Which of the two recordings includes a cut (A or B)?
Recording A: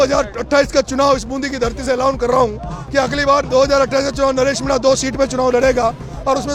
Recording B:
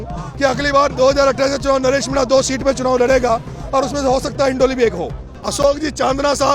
B